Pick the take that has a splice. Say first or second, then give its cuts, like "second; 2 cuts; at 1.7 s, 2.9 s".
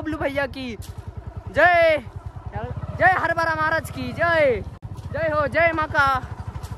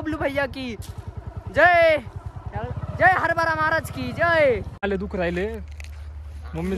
second; 1 cut; at 4.8 s